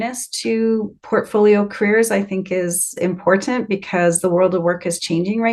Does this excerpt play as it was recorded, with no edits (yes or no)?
no